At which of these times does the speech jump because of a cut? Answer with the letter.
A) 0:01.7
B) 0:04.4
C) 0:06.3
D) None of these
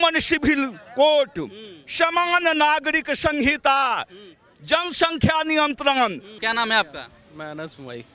C